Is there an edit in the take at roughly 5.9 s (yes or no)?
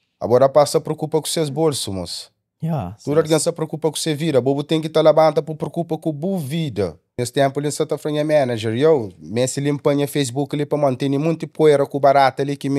no